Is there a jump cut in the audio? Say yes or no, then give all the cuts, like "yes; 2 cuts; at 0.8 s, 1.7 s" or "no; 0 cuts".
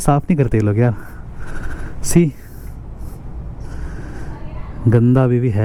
no; 0 cuts